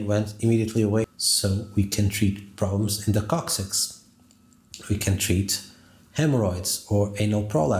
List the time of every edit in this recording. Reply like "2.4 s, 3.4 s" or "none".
1.1 s

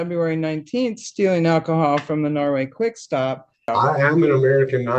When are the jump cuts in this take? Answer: 3.7 s

